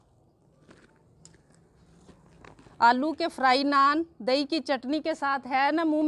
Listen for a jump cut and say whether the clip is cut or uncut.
uncut